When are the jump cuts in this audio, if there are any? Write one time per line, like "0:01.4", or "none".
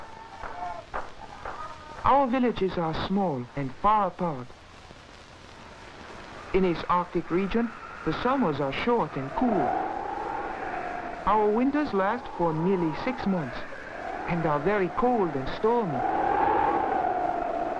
0:11.7